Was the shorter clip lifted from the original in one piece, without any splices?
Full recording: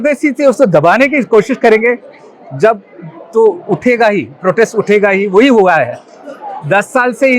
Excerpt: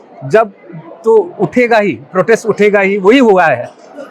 yes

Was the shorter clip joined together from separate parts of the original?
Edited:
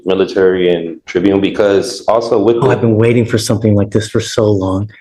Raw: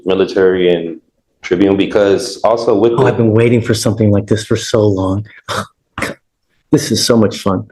yes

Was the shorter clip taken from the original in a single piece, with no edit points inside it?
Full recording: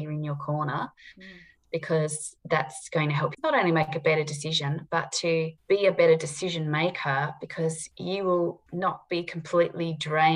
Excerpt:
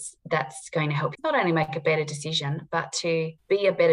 yes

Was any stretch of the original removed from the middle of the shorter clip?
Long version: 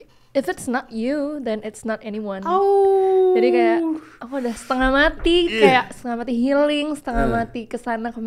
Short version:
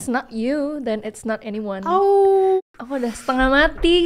yes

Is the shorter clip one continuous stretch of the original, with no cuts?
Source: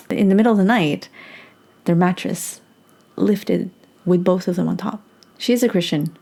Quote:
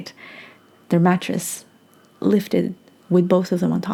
yes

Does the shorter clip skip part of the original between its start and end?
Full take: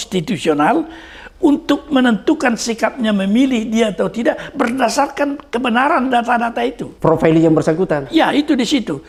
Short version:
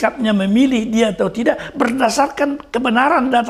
no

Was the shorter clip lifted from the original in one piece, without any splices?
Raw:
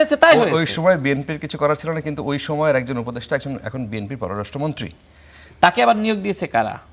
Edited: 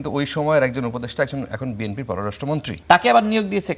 no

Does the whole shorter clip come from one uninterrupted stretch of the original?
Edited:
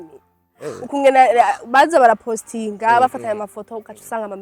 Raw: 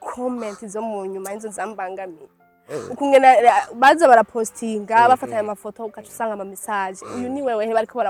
yes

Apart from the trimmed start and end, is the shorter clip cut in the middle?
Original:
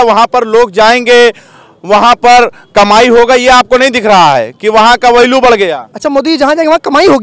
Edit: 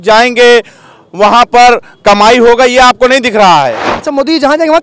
yes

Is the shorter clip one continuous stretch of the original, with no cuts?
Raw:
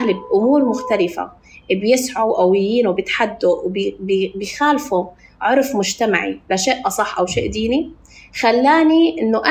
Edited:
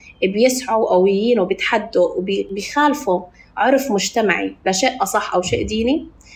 no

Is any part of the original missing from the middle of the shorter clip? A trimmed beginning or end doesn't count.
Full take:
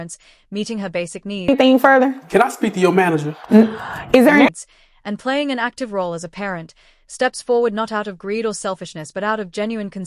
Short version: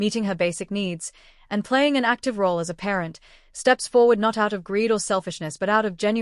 yes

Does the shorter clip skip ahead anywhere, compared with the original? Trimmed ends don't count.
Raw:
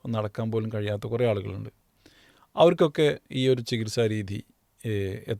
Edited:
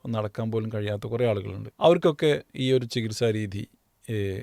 yes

